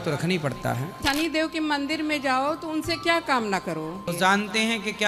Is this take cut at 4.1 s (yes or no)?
yes